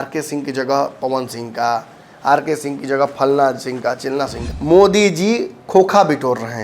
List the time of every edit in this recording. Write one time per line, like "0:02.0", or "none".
0:04.5